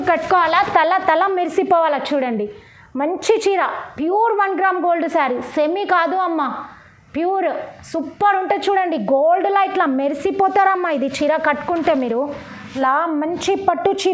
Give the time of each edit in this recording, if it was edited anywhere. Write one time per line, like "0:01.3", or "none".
0:12.7